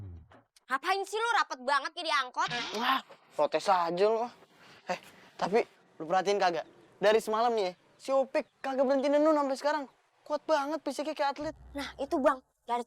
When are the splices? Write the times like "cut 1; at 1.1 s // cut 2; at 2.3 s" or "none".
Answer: none